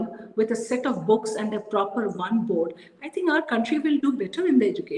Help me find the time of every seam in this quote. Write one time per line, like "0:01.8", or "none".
none